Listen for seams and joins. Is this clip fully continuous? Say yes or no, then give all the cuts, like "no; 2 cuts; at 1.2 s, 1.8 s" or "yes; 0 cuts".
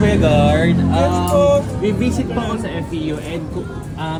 yes; 0 cuts